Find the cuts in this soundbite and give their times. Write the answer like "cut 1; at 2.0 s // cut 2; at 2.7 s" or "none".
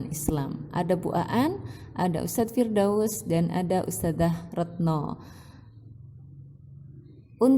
cut 1; at 2.5 s